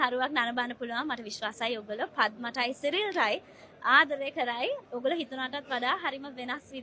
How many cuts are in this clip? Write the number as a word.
one